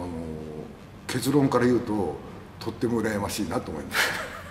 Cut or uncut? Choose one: uncut